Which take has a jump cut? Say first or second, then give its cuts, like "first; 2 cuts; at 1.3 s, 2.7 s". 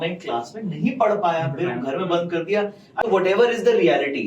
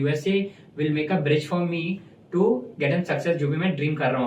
first; 1 cut; at 3.0 s